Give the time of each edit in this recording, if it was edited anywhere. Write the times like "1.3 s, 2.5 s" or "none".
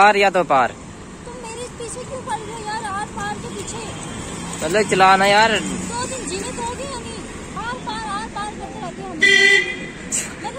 0.9 s, 7.6 s